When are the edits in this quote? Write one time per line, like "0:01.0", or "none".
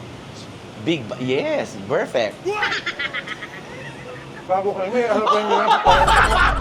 0:04.5